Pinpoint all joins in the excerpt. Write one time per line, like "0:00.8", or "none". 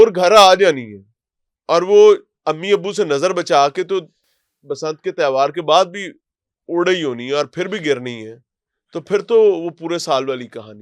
none